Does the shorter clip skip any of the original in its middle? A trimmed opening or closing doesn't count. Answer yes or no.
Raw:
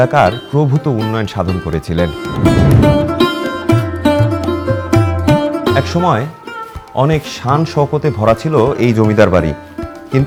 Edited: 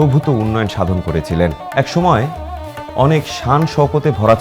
yes